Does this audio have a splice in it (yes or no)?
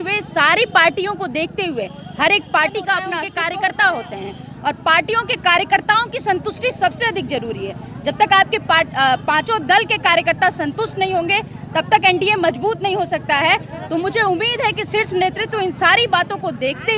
yes